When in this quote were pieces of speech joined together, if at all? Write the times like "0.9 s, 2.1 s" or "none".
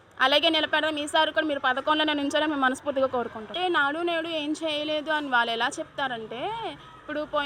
3.5 s